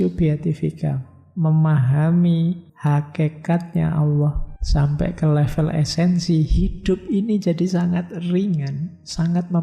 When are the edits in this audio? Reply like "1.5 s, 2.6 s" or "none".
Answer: 2.7 s, 4.5 s